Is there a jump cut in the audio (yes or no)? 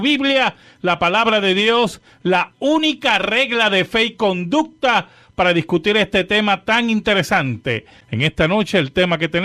no